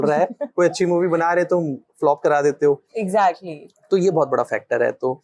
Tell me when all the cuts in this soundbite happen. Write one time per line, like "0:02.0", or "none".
none